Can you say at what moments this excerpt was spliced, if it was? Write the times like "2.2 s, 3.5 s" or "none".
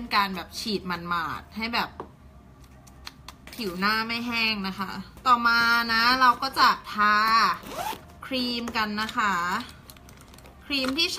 5.1 s